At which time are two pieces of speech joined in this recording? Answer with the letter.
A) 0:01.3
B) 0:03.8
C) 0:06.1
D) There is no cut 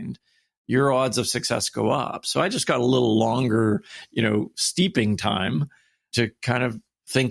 C